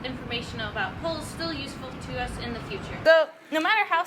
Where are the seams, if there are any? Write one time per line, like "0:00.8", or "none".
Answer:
0:03.0